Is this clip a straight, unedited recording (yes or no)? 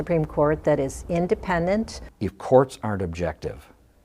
no